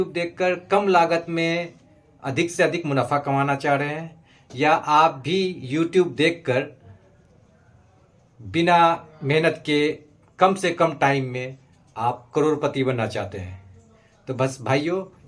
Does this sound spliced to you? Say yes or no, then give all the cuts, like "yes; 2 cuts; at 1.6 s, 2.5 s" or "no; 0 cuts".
no; 0 cuts